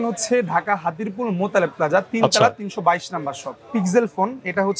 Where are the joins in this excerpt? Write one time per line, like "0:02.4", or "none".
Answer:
0:03.6